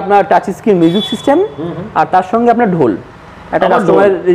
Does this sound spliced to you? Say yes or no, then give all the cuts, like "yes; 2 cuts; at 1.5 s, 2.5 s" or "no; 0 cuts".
no; 0 cuts